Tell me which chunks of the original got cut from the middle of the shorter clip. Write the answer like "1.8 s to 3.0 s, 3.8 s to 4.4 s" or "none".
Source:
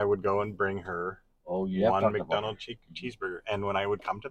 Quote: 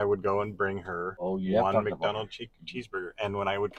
1.0 s to 1.3 s